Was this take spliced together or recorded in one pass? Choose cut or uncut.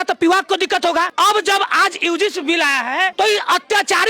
cut